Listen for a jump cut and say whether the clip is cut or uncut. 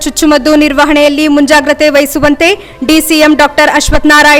uncut